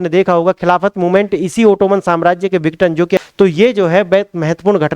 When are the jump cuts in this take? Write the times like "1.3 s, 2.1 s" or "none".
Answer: 3.2 s

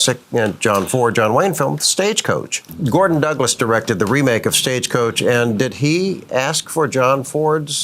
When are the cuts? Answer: 2.6 s

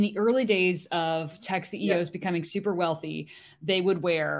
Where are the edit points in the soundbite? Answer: none

